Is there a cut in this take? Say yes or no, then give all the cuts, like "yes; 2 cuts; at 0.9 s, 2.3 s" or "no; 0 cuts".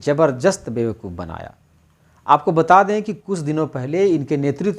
no; 0 cuts